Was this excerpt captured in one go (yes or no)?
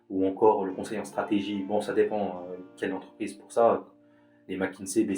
yes